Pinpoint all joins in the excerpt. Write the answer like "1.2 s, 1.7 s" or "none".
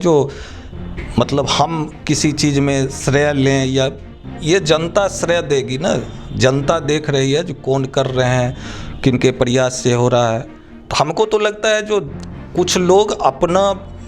10.5 s